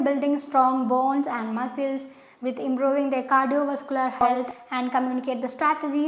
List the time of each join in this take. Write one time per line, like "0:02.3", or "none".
0:04.4

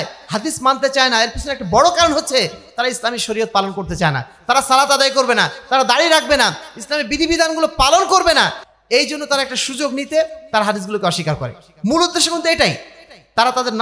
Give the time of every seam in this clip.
none

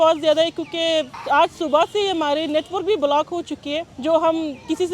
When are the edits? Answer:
0:01.2
0:03.9

